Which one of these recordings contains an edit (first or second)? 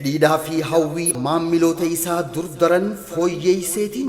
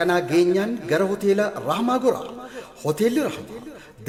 first